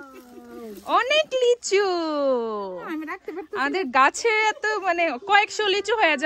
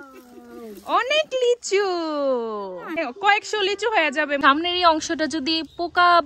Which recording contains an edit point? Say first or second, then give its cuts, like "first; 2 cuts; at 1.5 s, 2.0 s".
second; 2 cuts; at 3.0 s, 4.4 s